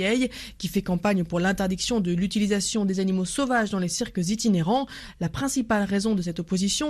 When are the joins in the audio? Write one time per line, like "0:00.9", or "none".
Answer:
0:05.0